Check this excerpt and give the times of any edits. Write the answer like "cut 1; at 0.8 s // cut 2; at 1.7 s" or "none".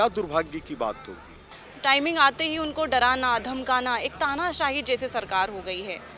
cut 1; at 1.6 s